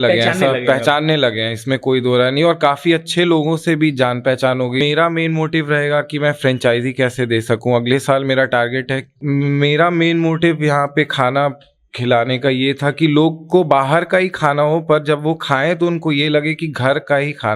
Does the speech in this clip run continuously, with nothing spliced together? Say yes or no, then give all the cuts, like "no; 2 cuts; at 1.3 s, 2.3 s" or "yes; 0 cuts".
no; 2 cuts; at 4.8 s, 9.2 s